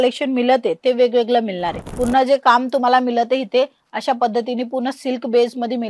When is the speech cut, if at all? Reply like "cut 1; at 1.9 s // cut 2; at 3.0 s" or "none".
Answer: cut 1; at 1.9 s